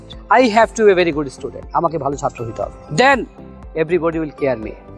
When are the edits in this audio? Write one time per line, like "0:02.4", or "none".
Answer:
0:02.8